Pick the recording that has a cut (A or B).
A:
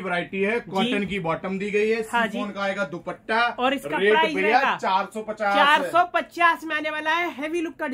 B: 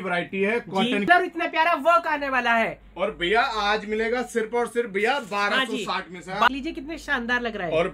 B